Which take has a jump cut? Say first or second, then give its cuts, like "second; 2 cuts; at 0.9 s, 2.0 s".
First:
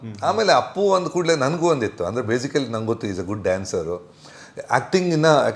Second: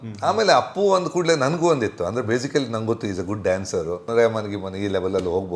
second; 1 cut; at 4.0 s